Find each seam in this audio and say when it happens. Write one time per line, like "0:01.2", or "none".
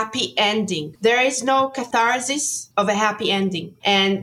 0:00.9
0:01.9